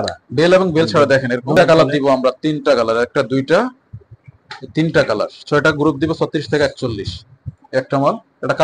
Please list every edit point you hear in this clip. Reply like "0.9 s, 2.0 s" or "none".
1.5 s, 7.6 s